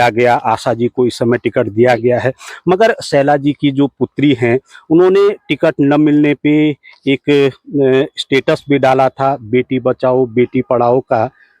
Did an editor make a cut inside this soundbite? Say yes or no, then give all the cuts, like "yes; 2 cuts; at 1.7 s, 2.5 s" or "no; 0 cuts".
no; 0 cuts